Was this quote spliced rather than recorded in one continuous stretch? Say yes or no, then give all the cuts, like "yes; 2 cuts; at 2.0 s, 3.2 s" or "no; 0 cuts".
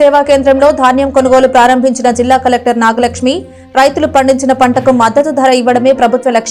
no; 0 cuts